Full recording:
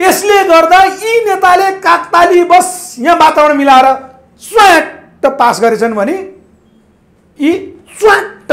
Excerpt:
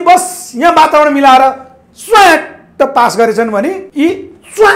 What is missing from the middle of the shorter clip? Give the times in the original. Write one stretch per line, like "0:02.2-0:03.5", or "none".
0:06.3-0:07.3